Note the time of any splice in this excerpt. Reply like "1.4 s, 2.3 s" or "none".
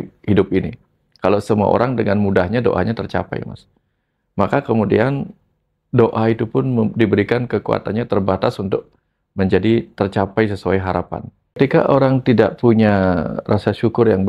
11.6 s